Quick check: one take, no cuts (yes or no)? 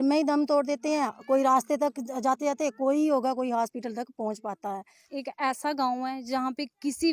no